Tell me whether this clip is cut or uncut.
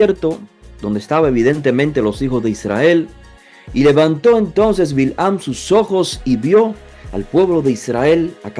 uncut